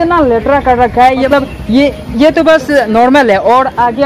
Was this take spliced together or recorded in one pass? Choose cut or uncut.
cut